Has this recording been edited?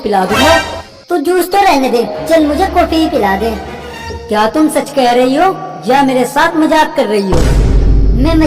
no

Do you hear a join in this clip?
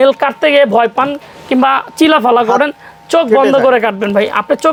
no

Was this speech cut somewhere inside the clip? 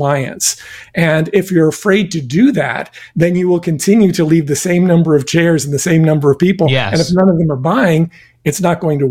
no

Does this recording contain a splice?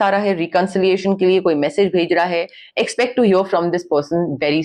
no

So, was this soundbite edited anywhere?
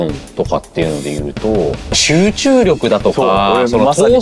yes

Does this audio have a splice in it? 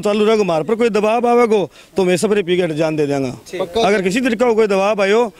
no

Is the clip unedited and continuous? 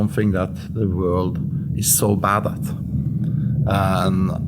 yes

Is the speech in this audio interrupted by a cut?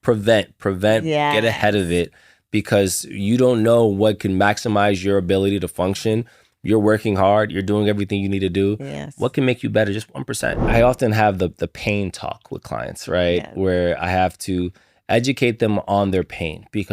yes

